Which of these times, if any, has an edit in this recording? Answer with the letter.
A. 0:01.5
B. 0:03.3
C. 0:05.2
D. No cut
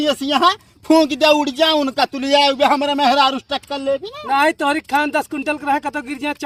D